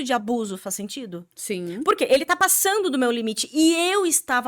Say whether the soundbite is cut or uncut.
uncut